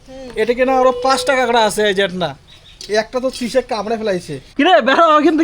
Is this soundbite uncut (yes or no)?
no